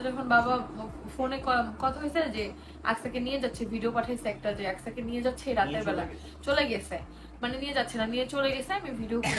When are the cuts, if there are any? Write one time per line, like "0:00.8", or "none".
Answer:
none